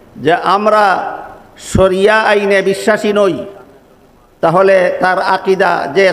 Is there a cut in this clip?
no; 0 cuts

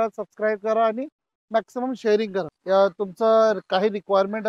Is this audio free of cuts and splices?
no; 1 cut; at 2.6 s

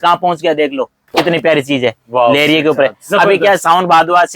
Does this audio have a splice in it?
yes; 1 cut; at 1.0 s

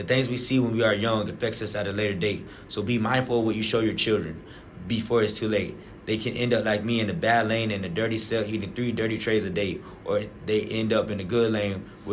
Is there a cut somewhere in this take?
yes; 1 cut; at 5.7 s

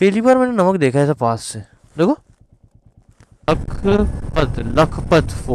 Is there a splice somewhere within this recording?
yes; 1 cut; at 3.5 s

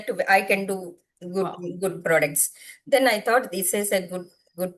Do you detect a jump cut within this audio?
no; 0 cuts

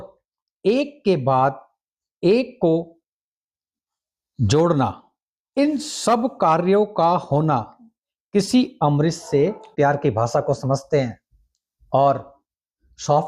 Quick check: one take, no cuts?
no; 1 cut; at 9.7 s

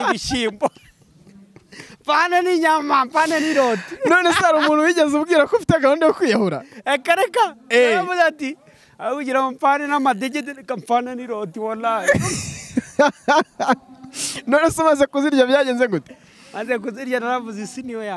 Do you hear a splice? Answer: no; 0 cuts

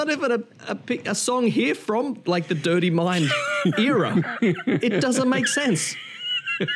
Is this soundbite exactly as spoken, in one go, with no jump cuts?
yes; 0 cuts

